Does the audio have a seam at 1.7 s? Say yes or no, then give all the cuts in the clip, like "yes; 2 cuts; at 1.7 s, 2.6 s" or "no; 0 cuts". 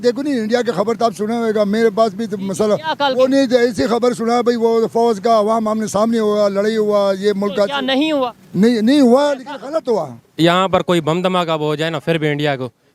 no; 1 cut; at 10.2 s